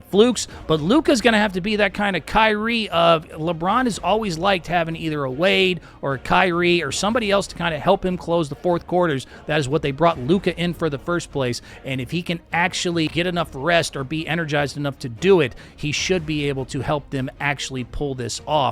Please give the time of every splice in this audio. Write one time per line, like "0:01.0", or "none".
0:13.1